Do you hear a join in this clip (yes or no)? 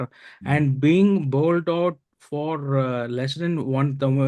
no